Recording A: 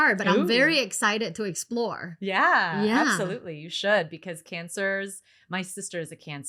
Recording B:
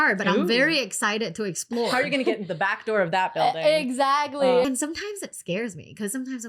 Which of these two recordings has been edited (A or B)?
B